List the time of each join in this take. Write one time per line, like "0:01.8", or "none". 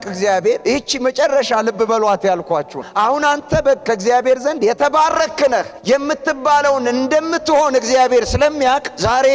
none